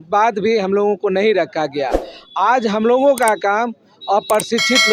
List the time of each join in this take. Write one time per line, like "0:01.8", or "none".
none